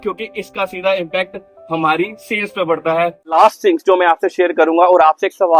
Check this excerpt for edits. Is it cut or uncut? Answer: cut